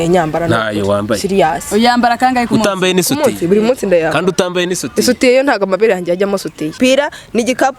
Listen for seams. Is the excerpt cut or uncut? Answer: cut